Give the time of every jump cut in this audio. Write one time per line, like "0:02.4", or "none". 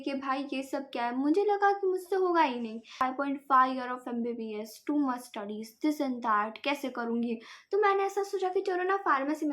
0:03.0